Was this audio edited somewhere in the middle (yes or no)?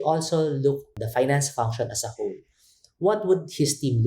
yes